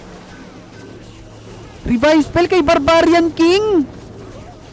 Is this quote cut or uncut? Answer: uncut